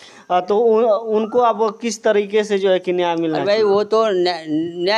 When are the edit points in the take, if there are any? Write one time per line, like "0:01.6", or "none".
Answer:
none